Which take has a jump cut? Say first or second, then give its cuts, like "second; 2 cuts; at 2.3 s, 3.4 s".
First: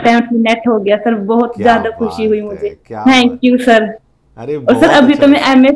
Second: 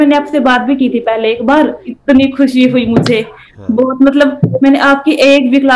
second; 1 cut; at 1.9 s